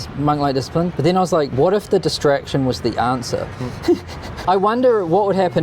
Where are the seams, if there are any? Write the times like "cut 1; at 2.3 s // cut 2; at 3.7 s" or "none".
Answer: cut 1; at 0.9 s // cut 2; at 4.3 s